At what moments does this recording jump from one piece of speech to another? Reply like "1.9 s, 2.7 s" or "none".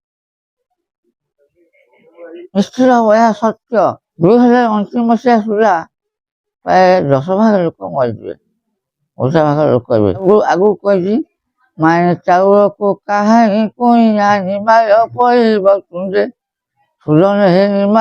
4.0 s, 10.2 s